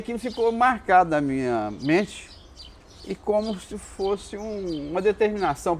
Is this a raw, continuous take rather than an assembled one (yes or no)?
yes